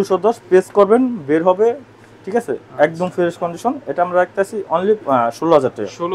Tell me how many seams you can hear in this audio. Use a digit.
0